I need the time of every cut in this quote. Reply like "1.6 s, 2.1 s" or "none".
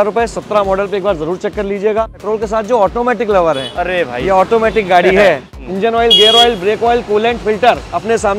2.2 s, 5.5 s

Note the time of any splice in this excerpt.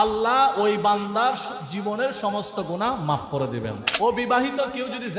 3.8 s

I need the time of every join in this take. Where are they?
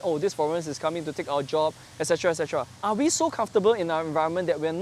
2.7 s

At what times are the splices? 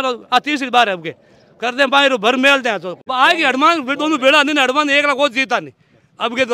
3.0 s

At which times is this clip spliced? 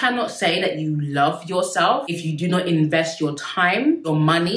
none

